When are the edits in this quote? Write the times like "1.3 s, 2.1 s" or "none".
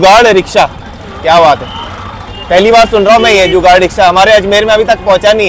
none